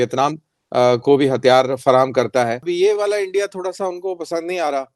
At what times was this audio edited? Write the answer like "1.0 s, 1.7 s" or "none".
2.7 s